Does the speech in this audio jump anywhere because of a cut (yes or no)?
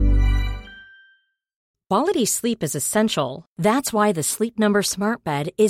yes